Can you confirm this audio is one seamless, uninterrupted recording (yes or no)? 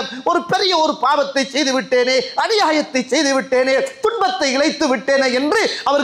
yes